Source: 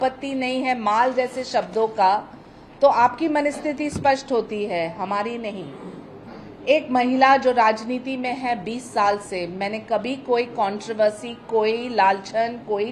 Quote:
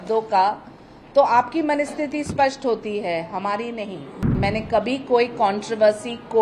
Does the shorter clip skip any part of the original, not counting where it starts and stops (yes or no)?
yes